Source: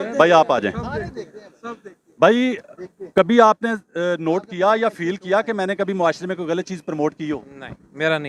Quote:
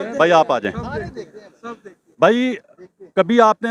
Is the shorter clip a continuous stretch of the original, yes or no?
yes